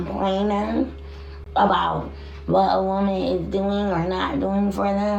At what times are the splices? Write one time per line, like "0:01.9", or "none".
none